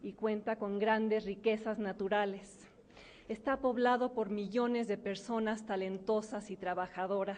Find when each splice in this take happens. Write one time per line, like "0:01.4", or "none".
0:02.4

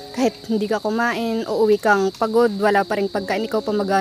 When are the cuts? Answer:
none

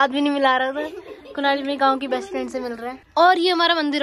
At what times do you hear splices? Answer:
none

